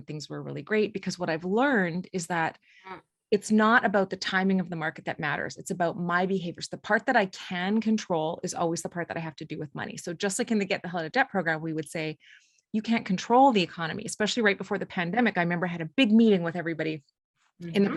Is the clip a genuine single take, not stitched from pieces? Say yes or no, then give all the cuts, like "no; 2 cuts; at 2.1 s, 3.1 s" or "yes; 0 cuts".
yes; 0 cuts